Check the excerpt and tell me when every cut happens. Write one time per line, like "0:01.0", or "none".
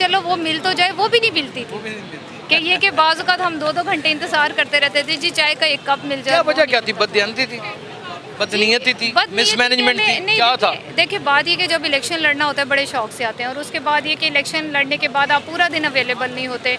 none